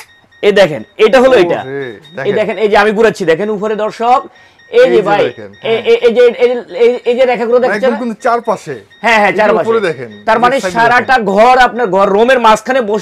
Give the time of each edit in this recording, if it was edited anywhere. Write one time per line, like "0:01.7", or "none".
none